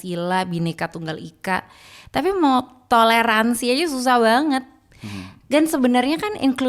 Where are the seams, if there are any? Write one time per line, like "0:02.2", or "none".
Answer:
none